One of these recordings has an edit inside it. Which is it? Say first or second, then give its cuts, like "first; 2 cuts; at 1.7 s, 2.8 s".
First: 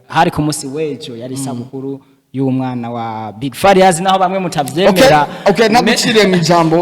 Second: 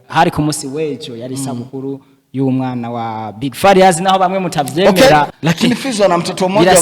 second; 1 cut; at 5.3 s